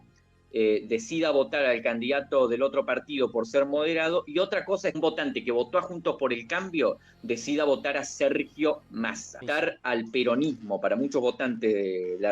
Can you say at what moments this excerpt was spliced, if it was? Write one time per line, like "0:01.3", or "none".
0:05.0
0:09.4